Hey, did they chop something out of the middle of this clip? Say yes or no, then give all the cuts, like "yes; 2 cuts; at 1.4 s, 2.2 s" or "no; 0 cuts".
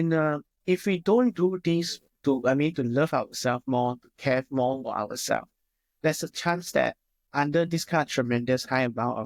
no; 0 cuts